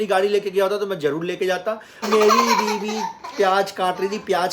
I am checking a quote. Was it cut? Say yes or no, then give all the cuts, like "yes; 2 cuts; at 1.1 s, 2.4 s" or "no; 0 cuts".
yes; 1 cut; at 2.0 s